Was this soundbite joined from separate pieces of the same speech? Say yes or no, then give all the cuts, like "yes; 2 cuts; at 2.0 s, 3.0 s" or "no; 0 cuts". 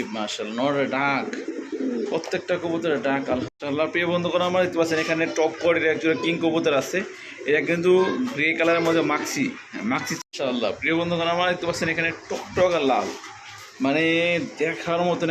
yes; 2 cuts; at 3.5 s, 10.1 s